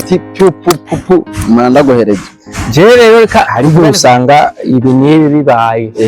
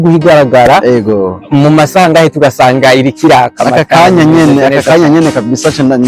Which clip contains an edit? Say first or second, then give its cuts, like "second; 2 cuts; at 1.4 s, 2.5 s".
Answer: first; 1 cut; at 3.5 s